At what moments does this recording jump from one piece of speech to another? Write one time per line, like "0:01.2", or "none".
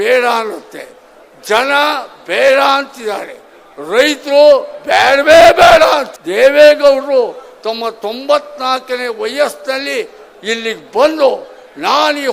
0:06.2